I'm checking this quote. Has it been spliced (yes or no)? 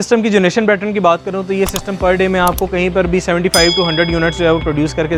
no